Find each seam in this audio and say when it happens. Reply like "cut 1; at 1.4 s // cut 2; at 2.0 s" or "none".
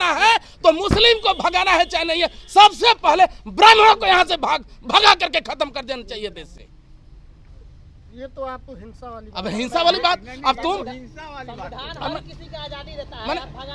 none